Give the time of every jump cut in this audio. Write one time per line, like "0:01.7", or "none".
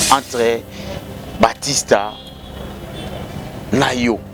none